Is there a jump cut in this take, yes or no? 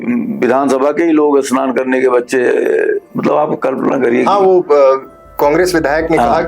no